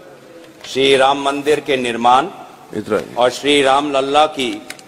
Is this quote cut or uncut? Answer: cut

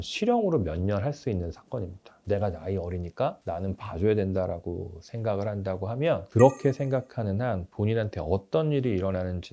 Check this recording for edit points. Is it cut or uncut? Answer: cut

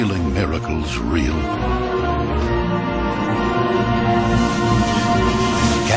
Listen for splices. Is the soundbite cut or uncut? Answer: cut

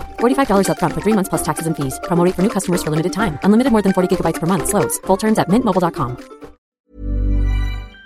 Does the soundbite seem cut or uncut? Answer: cut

